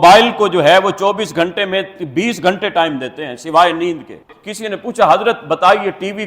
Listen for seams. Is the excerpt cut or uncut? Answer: cut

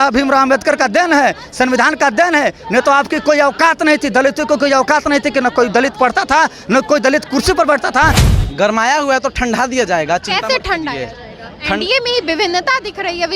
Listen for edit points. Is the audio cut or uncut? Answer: cut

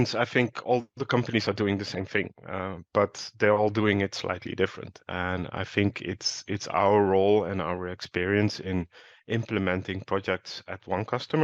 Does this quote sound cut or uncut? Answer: uncut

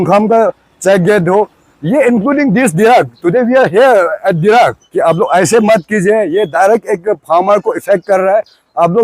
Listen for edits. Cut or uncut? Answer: cut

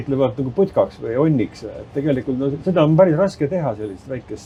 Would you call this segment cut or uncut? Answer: uncut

